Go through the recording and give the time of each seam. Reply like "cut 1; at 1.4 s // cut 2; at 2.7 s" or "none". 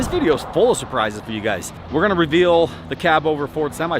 cut 1; at 1.8 s